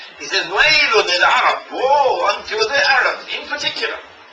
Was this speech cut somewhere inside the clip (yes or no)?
no